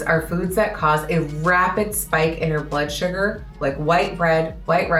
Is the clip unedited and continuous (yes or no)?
yes